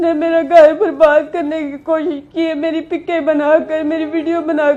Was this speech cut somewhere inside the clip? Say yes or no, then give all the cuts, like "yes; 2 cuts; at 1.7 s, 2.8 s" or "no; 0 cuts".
no; 0 cuts